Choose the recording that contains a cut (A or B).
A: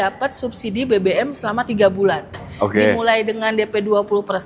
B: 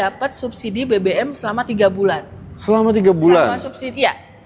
A